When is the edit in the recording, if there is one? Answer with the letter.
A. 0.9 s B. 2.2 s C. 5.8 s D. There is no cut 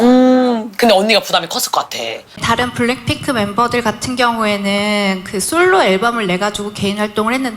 B